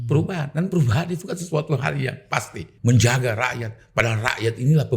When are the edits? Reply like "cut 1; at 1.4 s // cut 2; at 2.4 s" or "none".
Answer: cut 1; at 2.6 s